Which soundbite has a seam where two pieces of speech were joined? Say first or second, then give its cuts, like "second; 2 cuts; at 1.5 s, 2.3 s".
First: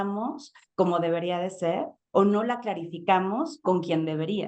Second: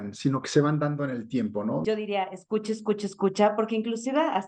second; 1 cut; at 1.8 s